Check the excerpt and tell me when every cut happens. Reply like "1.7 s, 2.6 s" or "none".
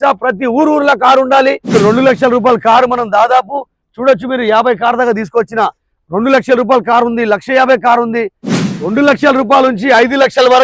1.8 s, 8.9 s